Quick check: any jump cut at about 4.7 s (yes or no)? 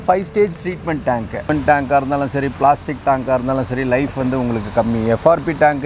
no